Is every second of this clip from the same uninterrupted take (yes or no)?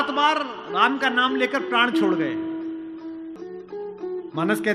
no